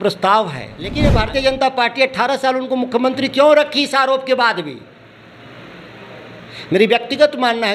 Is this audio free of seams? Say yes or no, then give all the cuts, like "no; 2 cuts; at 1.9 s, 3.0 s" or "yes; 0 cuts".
no; 1 cut; at 0.9 s